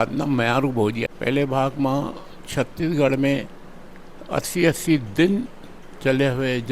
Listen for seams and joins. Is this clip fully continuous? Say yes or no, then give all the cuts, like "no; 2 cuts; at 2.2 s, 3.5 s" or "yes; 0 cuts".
no; 1 cut; at 1.0 s